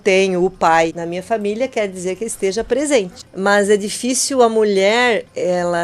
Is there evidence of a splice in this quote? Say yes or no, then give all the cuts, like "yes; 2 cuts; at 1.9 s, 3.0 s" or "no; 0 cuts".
yes; 2 cuts; at 1.0 s, 3.2 s